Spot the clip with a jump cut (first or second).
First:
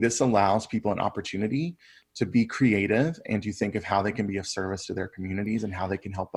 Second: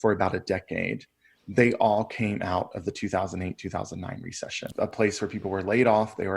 second